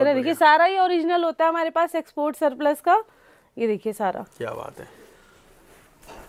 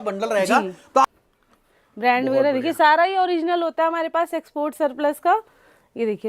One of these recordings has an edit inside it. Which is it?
second; 1 cut; at 1.1 s

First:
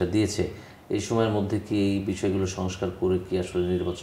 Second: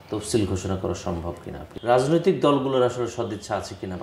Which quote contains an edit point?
second; 1 cut; at 1.7 s

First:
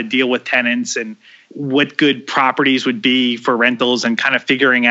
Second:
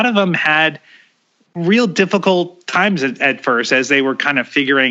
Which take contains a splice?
first; 1 cut; at 1.5 s

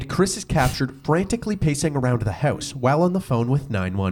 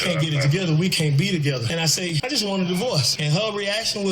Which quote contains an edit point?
second; 2 cuts; at 1.8 s, 3.1 s

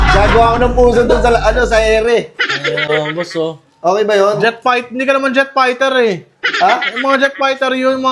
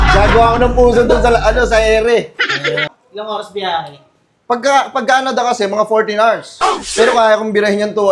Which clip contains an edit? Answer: second; 1 cut; at 2.8 s

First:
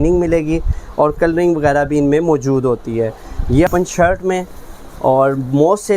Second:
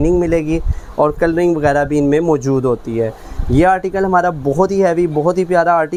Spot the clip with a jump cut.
first; 1 cut; at 3.7 s

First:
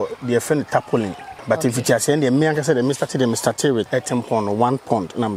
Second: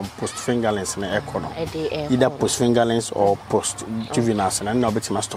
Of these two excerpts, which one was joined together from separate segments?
first; 2 cuts; at 1.3 s, 3.9 s

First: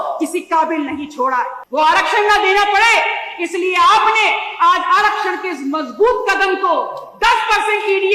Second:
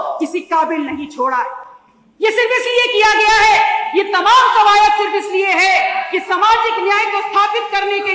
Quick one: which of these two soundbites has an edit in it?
first; 1 cut; at 1.6 s

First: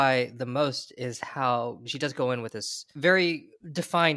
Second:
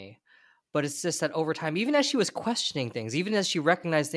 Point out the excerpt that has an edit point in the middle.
first; 2 cuts; at 1.9 s, 2.9 s

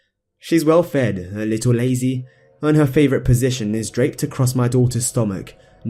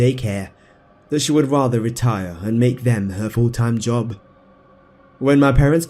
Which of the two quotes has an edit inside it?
second; 1 cut; at 1.0 s

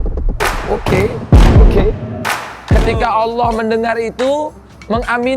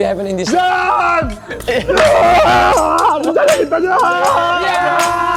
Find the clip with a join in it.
first; 1 cut; at 2.7 s

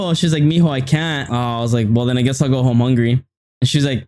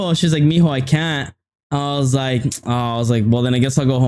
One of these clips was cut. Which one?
first; 1 cut; at 1.2 s

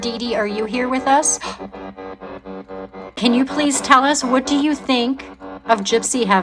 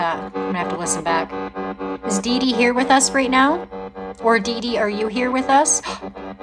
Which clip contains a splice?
first; 1 cut; at 3.1 s

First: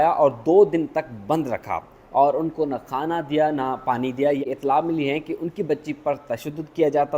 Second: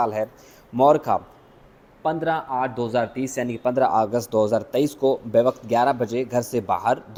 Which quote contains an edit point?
first; 1 cut; at 4.5 s

